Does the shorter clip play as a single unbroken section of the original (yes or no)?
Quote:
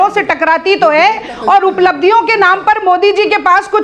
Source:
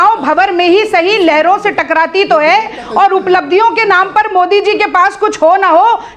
yes